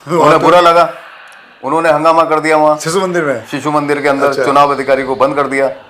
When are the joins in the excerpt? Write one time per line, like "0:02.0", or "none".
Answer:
none